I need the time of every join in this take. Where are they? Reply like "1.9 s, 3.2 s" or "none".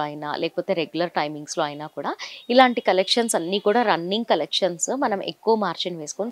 none